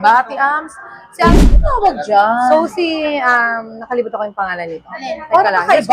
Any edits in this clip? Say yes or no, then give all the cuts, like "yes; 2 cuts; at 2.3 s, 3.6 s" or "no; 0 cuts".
yes; 1 cut; at 1.3 s